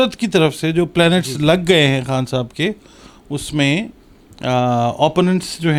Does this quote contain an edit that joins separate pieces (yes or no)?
no